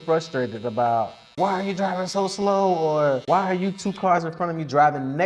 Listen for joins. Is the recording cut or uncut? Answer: cut